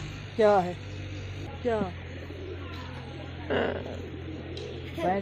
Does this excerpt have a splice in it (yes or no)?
yes